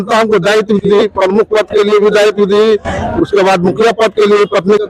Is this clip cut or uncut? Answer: uncut